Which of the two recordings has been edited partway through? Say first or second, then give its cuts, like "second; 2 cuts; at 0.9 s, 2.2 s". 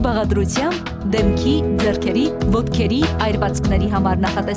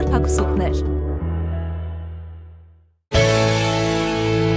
second; 1 cut; at 3.1 s